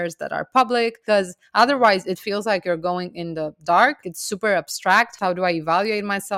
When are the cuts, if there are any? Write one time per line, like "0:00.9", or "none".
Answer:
0:01.0
0:04.1
0:05.1